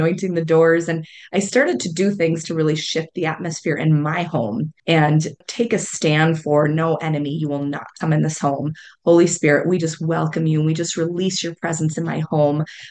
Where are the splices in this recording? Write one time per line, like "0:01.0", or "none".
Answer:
0:04.7
0:05.4

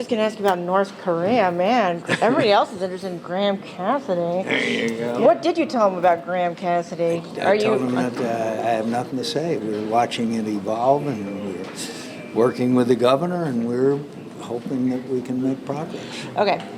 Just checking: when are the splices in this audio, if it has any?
none

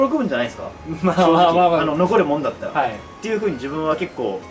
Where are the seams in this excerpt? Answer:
none

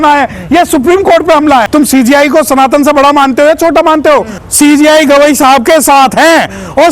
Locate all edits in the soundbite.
0:01.7
0:04.3

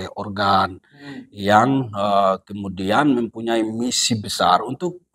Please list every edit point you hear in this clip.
none

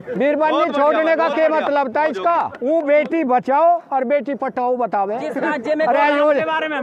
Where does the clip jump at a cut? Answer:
none

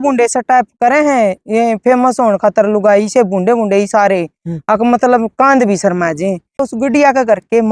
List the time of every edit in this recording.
0:06.6

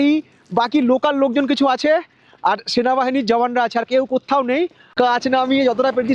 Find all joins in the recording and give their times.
0:04.8

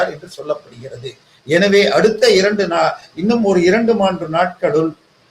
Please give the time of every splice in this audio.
none

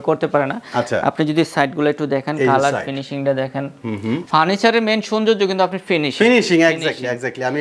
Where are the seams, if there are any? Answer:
0:04.2

